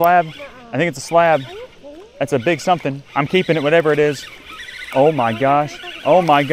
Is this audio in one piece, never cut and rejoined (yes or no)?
yes